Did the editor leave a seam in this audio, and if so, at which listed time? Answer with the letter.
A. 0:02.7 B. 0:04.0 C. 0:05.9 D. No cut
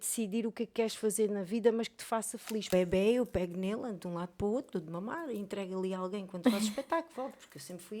A